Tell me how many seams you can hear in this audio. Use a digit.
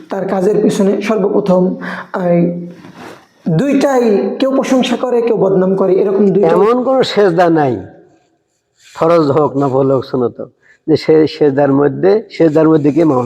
1